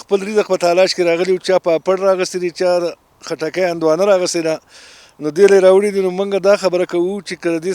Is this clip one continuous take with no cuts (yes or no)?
yes